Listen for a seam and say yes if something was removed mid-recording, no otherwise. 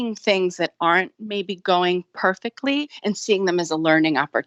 no